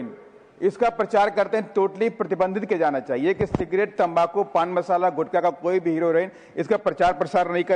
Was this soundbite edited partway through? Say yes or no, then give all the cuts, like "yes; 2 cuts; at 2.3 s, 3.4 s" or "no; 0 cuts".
no; 0 cuts